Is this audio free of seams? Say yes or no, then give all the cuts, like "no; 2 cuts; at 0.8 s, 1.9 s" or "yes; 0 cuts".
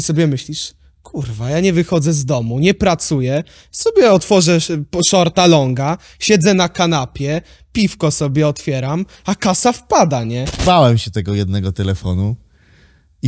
no; 1 cut; at 10.4 s